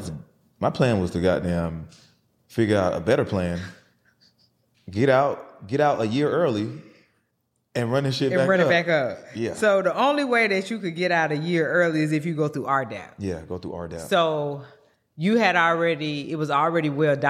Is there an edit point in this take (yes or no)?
no